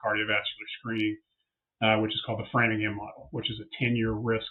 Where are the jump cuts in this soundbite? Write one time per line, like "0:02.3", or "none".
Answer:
none